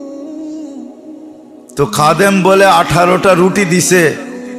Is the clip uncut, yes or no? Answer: no